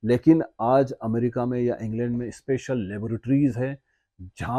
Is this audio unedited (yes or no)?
yes